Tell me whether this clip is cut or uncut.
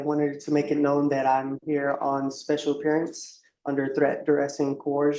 uncut